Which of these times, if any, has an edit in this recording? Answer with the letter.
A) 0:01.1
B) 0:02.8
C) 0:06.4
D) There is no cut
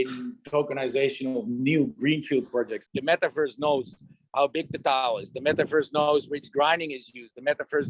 B